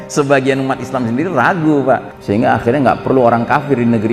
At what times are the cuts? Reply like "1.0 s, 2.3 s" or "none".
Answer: 2.1 s

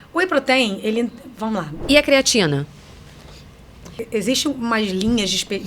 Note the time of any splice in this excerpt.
1.7 s, 4.0 s

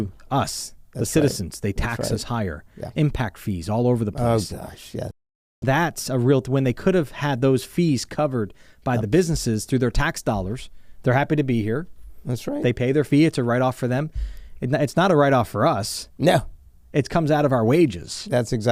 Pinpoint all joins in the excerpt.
none

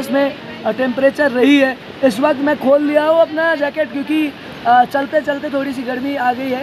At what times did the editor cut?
none

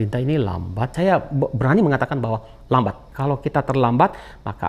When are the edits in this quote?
0.9 s, 3.1 s

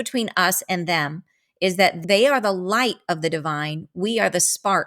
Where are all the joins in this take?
2.0 s

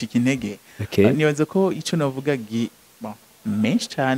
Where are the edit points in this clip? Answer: 3.2 s

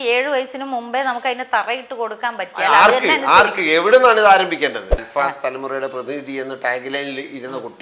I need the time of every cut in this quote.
4.9 s

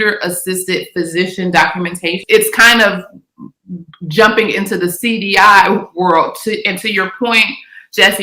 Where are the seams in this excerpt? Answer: 2.2 s

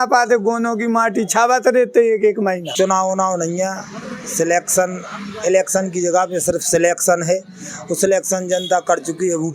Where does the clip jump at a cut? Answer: 2.7 s

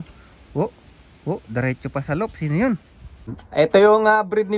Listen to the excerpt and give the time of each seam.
3.4 s

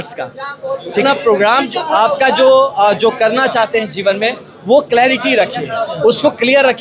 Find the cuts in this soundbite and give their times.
1.0 s

